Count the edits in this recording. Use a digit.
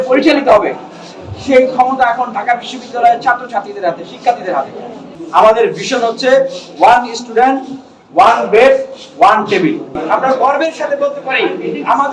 2